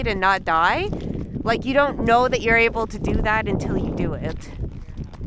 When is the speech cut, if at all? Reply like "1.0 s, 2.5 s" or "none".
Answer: none